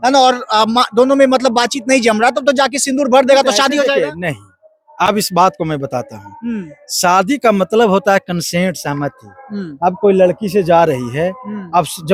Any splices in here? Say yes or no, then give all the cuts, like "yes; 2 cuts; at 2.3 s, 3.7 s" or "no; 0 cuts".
no; 0 cuts